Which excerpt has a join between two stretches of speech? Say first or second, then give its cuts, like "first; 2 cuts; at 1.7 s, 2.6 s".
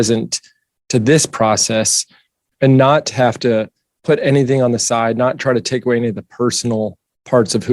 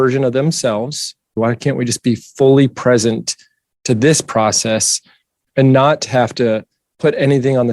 second; 1 cut; at 1.3 s